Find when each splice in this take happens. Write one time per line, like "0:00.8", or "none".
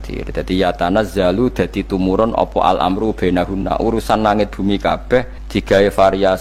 0:05.4

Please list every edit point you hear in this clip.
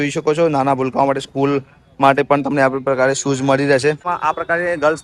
0:04.1

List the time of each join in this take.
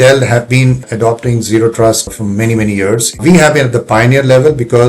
0:00.9
0:02.1
0:03.2

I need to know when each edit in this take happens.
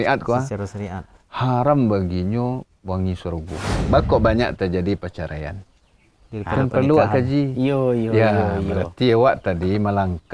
0:03.8

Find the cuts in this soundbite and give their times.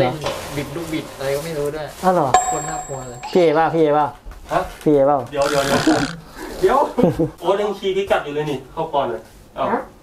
0:07.4

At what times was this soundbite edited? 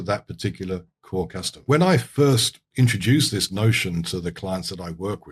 0:01.6

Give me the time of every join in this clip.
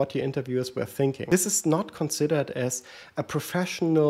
0:01.2

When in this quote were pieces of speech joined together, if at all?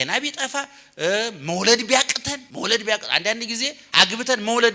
0:02.4

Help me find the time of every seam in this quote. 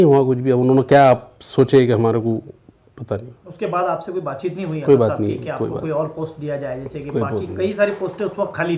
none

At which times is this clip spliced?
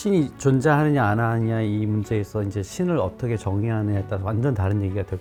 none

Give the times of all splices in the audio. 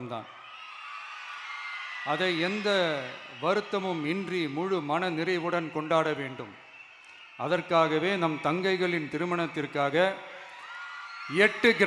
none

